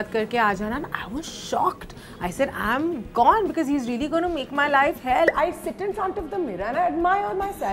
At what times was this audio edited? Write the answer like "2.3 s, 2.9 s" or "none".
5.3 s